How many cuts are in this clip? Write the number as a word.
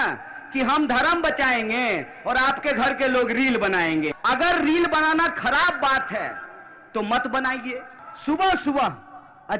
two